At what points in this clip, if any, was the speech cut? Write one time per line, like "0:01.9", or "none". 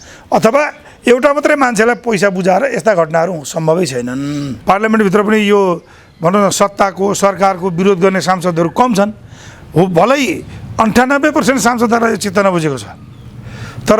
0:04.5